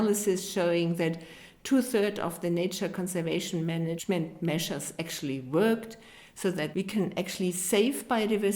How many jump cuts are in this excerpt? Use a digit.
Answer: 2